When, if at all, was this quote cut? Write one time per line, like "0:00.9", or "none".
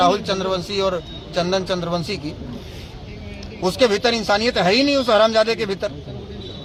none